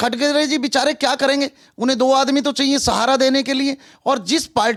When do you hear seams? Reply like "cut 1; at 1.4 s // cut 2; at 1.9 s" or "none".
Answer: none